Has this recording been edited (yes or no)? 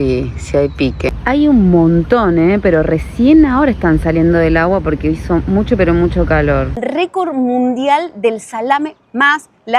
yes